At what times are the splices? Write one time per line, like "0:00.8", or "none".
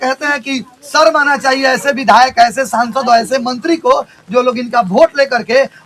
none

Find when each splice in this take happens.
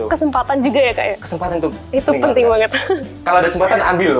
none

